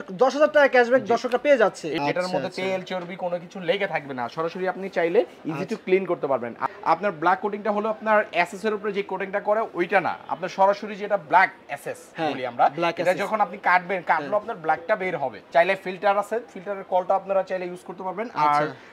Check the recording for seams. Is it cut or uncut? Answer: cut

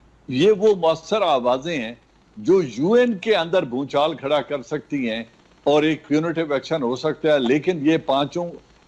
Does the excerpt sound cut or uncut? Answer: uncut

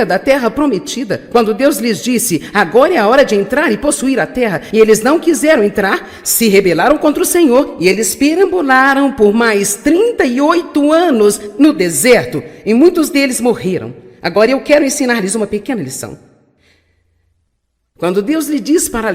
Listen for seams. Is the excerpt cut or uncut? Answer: cut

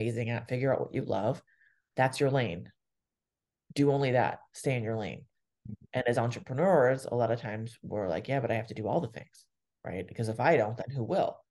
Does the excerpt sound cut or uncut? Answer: uncut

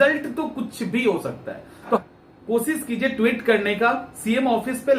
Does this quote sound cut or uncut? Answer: cut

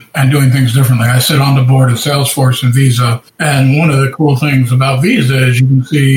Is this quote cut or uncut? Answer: uncut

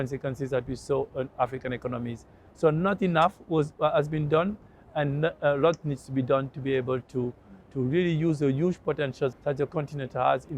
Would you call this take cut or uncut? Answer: cut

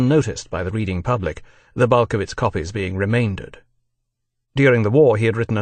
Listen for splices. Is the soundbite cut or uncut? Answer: uncut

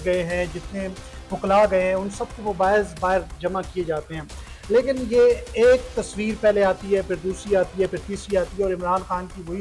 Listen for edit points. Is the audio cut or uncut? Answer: uncut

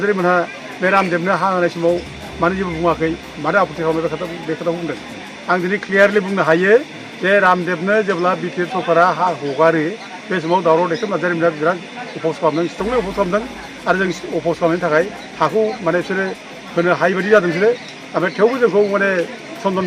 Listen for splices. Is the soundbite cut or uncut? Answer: uncut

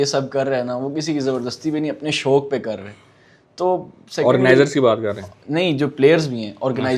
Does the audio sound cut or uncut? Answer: uncut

